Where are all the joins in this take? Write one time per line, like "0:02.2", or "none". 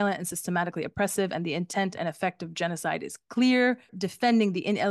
0:03.9